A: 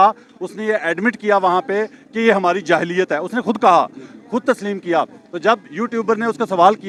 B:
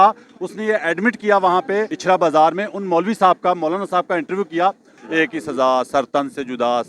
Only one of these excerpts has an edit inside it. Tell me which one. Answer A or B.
B